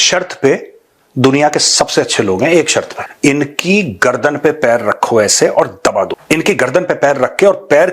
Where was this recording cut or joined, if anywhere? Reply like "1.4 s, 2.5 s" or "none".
3.0 s, 6.2 s